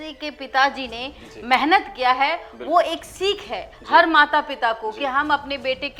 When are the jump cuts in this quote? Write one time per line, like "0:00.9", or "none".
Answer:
none

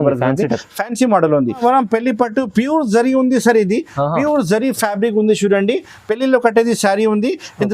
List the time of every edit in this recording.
0:01.6

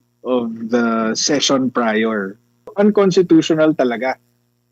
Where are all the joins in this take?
0:02.7

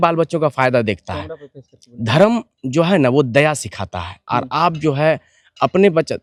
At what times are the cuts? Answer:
none

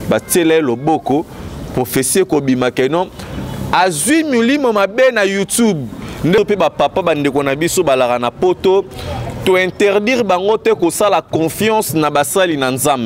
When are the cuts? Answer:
0:06.4

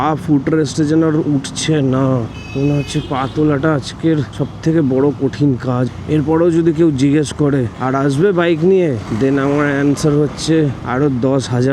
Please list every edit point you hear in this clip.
0:02.4
0:04.4
0:05.9
0:07.7
0:09.0
0:10.8

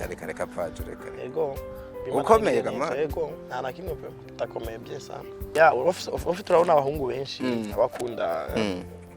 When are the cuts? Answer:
0:05.4

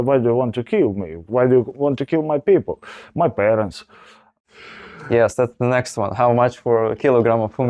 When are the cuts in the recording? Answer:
0:04.3

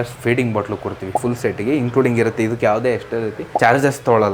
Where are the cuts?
0:01.2
0:03.4

